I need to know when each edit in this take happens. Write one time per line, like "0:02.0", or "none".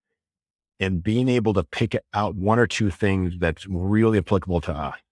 0:02.4